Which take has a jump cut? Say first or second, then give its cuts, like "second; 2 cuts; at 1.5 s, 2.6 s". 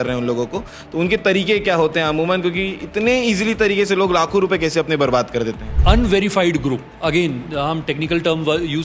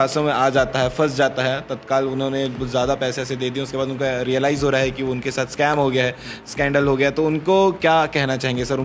first; 1 cut; at 5.7 s